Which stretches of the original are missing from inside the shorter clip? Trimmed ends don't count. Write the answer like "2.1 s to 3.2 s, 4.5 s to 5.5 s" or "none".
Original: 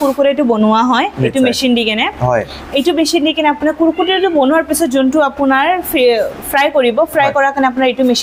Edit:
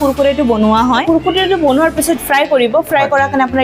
1.0 s to 3.8 s, 4.9 s to 6.4 s